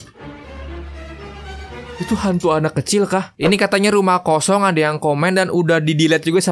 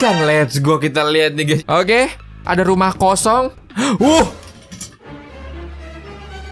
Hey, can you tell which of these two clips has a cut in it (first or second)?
second